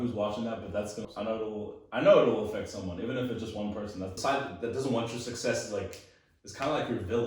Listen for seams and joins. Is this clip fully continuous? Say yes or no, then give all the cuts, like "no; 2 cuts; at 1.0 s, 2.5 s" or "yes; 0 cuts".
no; 2 cuts; at 1.0 s, 4.1 s